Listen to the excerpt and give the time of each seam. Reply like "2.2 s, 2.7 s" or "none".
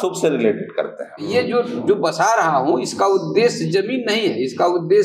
1.3 s